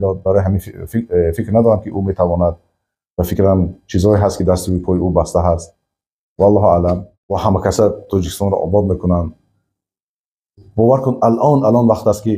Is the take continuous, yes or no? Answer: no